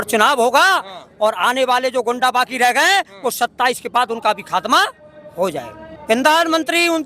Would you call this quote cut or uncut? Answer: cut